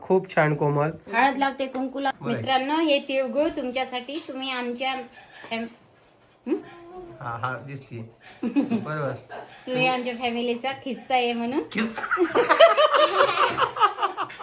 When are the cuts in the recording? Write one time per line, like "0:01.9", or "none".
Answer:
0:02.2